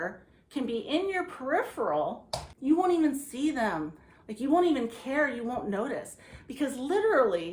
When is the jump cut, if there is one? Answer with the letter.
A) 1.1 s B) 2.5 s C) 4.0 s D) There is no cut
B